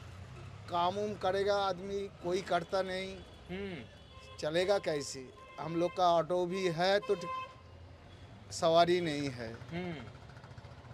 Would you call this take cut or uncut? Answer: uncut